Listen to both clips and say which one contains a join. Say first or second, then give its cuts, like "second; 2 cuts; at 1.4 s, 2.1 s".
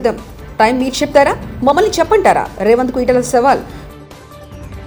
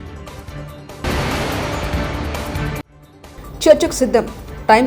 second; 2 cuts; at 1.0 s, 2.8 s